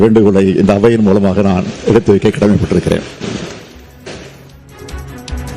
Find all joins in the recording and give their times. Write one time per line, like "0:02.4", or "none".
0:04.7